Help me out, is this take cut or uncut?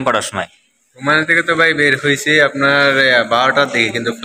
uncut